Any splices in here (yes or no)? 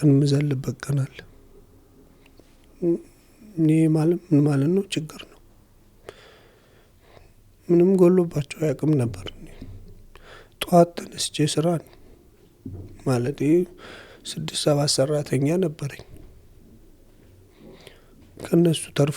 no